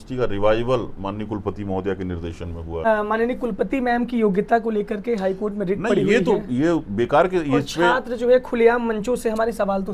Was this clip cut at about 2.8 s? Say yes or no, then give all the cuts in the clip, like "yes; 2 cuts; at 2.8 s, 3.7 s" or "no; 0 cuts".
yes; 1 cut; at 2.8 s